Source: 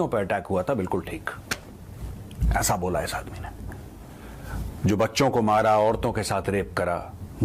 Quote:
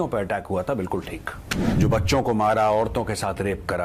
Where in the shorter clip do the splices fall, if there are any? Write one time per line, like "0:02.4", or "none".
0:01.7